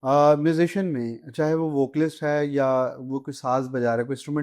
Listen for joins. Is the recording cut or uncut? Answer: uncut